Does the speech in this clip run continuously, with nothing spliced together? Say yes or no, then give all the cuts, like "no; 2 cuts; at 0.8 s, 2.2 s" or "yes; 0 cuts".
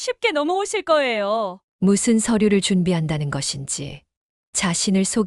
no; 1 cut; at 1.6 s